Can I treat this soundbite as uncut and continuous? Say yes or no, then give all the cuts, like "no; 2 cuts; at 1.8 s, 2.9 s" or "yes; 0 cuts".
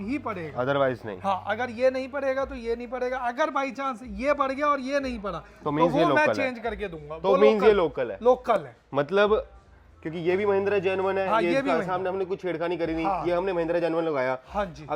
yes; 0 cuts